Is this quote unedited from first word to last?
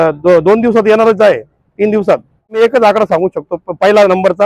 no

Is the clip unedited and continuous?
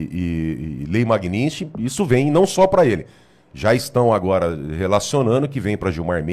yes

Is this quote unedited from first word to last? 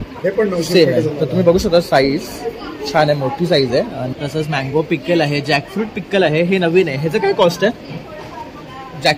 no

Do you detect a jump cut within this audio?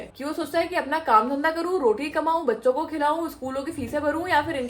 no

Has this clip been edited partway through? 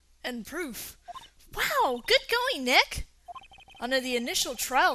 yes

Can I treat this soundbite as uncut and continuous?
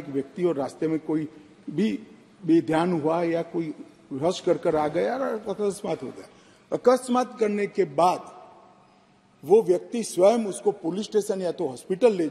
yes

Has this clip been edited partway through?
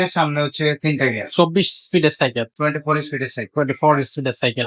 no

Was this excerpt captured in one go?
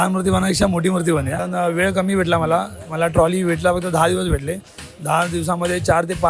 no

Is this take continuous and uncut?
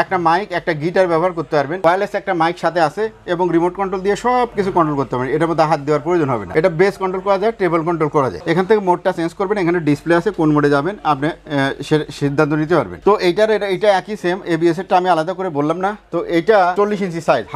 yes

